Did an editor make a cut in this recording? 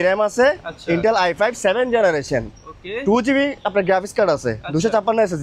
no; 0 cuts

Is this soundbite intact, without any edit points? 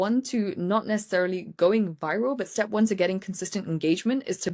yes; 0 cuts

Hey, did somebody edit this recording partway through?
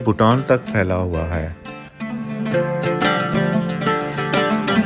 no; 0 cuts

